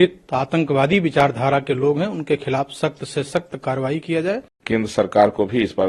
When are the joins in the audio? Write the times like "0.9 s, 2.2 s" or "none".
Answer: 4.5 s